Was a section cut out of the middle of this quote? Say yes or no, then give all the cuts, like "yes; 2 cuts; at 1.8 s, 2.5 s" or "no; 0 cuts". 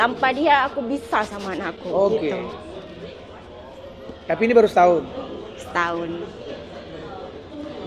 no; 0 cuts